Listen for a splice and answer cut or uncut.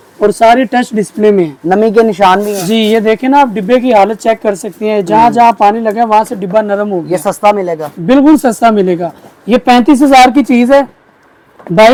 uncut